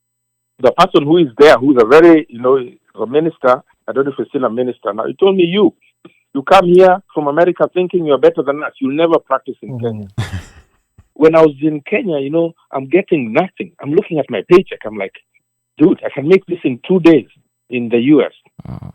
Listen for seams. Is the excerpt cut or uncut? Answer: cut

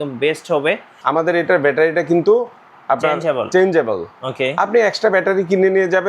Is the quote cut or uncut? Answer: cut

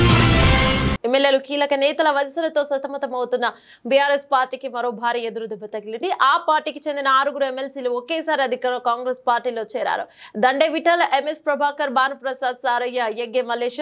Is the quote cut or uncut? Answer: cut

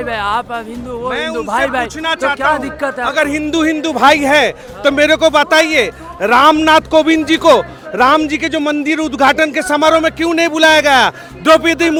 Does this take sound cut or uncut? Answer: uncut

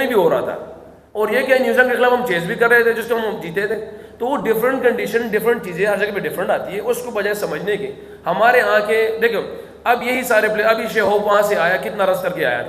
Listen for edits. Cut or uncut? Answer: uncut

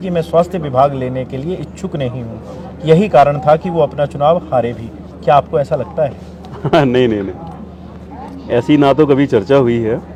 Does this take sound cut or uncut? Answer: uncut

